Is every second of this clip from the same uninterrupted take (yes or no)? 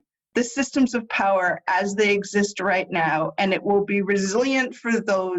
yes